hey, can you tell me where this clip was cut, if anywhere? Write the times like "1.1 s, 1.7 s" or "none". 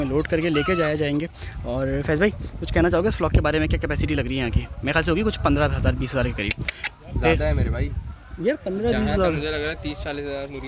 none